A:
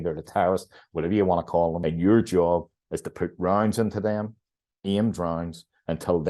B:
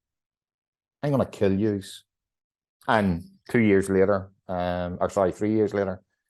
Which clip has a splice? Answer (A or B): A